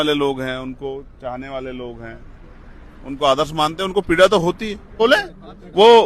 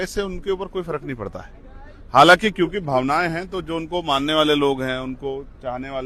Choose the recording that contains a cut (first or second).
first